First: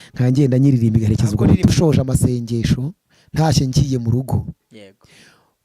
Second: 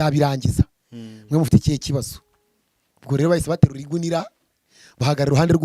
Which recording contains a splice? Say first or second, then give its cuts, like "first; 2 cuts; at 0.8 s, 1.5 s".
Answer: first; 1 cut; at 1.7 s